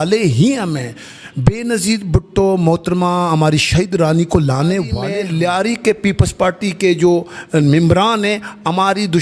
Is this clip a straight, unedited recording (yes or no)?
no